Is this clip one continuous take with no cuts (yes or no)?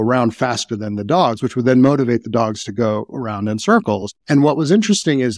no